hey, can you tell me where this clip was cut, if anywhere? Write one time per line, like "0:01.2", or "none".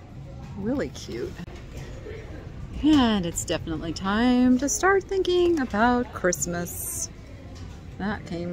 0:01.5